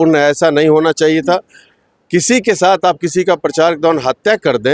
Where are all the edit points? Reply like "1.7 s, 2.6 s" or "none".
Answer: none

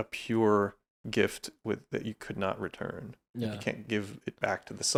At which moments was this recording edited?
none

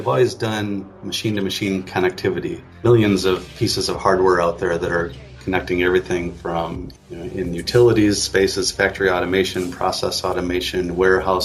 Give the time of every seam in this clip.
2.7 s, 6.9 s

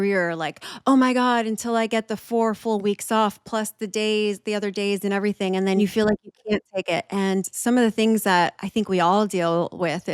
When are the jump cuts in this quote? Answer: 5.8 s

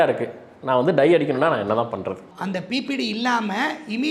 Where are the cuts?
2.3 s

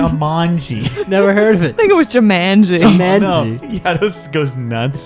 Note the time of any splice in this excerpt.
3.6 s

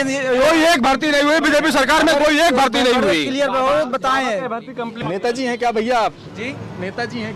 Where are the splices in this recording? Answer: 5.0 s

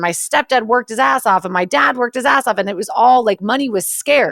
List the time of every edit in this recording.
none

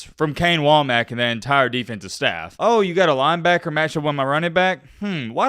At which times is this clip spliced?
2.4 s

